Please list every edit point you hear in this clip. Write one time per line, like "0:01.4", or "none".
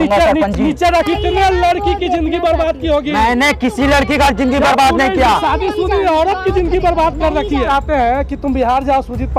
0:01.1
0:07.6